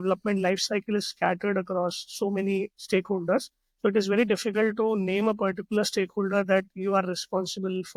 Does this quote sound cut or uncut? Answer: uncut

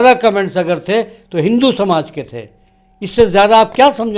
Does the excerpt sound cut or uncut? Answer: uncut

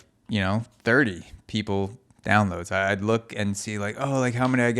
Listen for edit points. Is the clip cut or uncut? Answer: cut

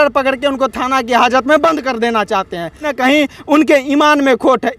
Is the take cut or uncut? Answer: cut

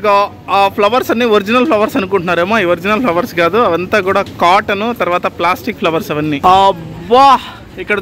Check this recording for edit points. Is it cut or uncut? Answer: cut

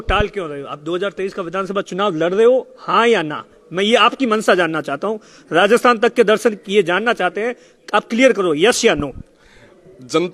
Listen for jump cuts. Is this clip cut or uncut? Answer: uncut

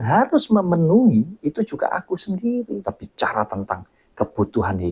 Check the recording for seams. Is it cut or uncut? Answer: cut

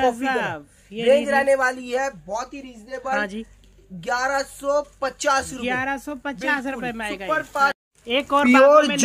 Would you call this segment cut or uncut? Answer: uncut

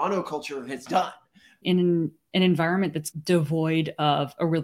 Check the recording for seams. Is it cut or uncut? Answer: cut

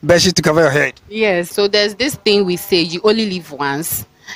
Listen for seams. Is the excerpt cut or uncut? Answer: cut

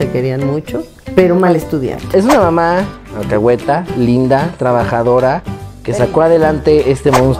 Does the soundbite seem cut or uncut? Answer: cut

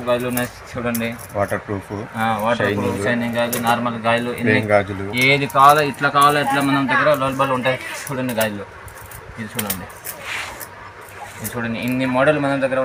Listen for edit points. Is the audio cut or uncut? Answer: uncut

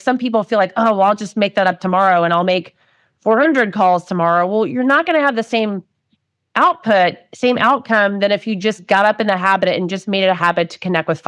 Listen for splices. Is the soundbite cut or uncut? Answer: uncut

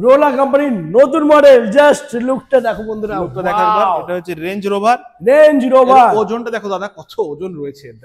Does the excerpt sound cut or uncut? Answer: uncut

